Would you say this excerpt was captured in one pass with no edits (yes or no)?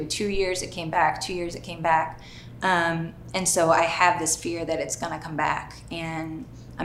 yes